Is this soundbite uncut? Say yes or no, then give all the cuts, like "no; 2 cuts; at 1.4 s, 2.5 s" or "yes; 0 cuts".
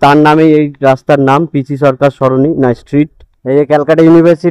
yes; 0 cuts